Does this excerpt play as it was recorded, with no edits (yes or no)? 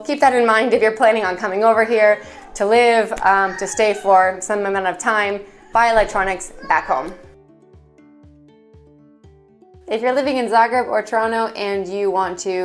yes